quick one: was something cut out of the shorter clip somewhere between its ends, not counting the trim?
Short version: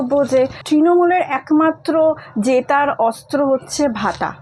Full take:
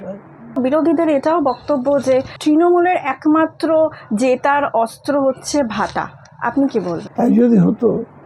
no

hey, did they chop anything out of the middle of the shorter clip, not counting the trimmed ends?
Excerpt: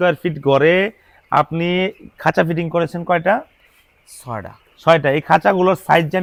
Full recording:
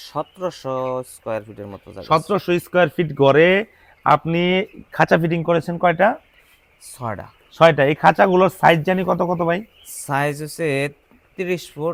no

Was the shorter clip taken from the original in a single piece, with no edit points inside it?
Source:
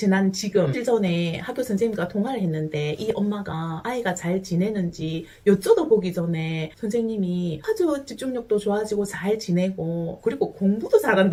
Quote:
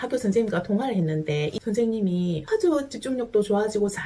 no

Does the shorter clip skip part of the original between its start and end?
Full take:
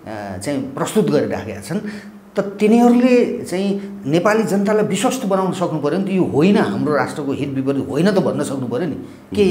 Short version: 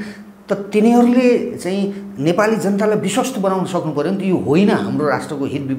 no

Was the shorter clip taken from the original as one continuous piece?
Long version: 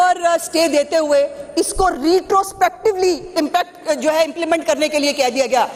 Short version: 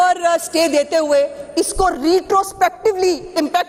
yes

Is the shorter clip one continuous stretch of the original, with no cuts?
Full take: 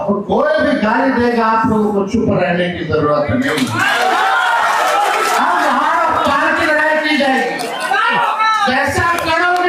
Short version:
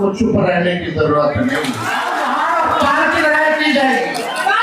no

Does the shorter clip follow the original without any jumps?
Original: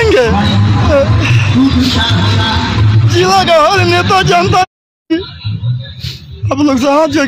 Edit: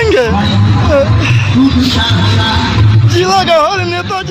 yes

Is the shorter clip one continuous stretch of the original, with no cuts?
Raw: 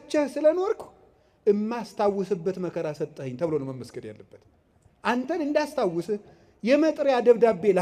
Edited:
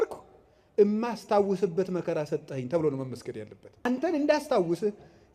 no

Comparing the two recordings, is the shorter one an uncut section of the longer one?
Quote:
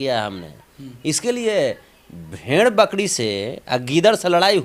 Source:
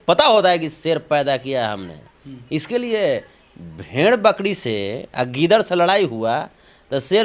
yes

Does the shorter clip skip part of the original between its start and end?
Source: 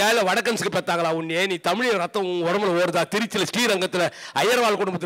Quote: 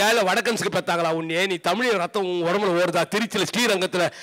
no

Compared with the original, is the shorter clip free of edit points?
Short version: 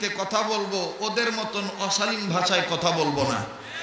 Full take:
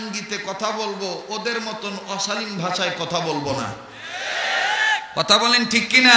yes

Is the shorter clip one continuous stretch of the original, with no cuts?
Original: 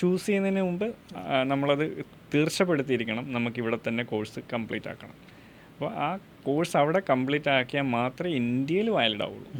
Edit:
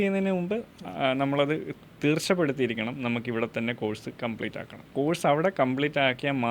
no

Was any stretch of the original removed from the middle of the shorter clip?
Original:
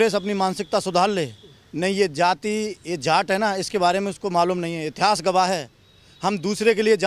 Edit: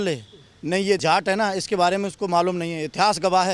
yes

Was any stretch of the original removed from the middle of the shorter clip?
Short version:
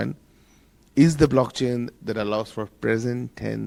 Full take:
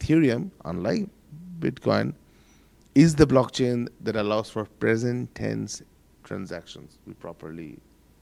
no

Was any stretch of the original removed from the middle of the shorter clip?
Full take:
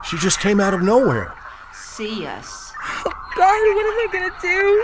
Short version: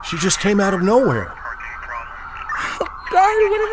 yes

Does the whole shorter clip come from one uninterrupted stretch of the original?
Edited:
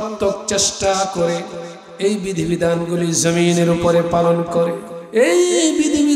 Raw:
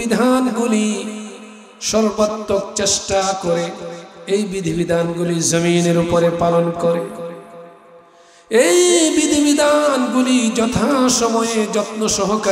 no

